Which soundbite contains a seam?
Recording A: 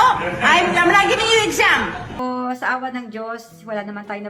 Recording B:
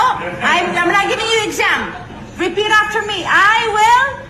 A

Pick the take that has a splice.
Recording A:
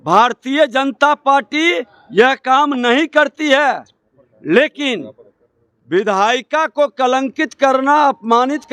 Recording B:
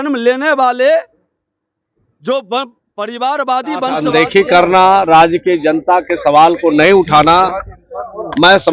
B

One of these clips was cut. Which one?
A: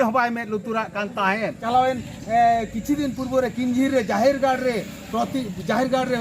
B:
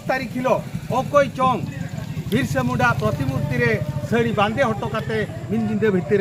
A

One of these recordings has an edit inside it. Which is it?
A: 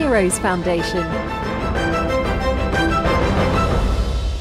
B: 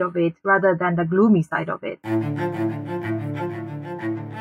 B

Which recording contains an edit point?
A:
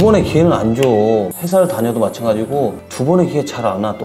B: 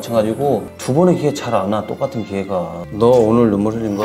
B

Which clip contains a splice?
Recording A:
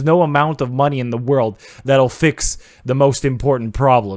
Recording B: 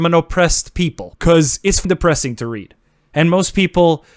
B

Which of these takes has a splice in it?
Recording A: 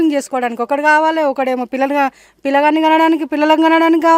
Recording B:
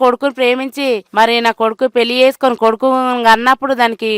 B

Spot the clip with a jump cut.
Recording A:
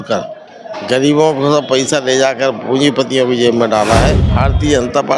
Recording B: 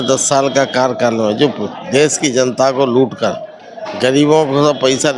A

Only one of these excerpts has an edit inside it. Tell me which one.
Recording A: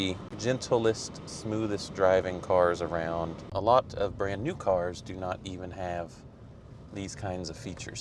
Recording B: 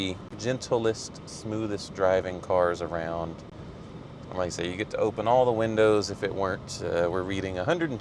A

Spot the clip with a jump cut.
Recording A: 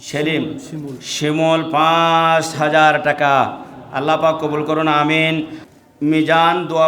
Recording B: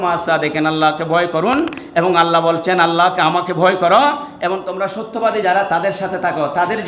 A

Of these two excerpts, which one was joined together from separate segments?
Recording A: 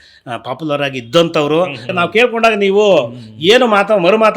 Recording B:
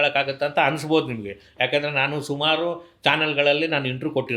A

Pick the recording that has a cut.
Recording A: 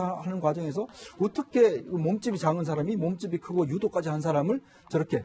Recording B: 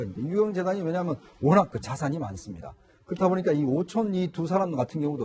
B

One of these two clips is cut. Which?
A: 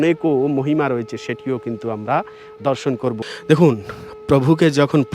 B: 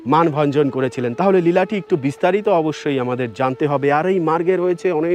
A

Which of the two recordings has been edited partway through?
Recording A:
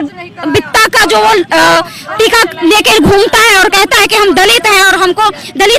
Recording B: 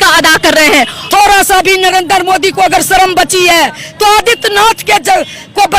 B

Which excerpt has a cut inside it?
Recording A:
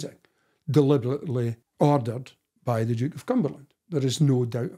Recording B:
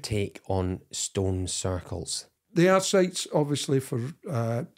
B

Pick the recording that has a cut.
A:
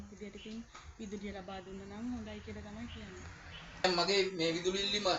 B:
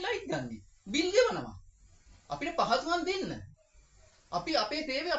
A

